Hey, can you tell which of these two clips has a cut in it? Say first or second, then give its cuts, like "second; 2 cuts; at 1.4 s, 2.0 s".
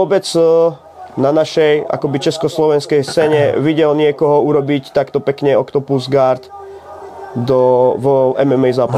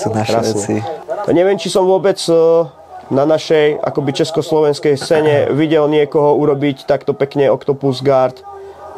second; 1 cut; at 1.0 s